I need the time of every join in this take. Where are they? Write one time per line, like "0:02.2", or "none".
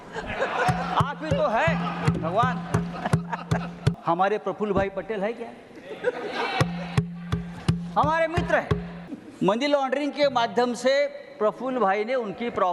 0:03.9
0:08.9